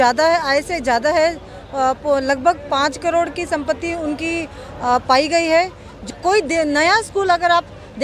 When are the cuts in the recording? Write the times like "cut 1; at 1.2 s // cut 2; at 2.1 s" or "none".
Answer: cut 1; at 6.0 s